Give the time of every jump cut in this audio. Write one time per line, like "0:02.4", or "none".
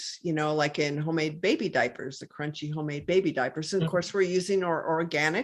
none